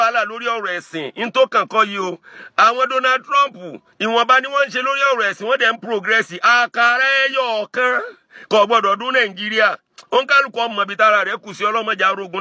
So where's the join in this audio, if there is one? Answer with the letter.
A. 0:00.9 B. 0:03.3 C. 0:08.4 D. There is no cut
D